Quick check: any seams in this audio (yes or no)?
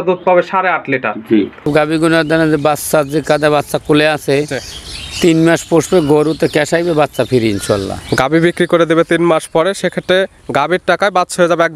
yes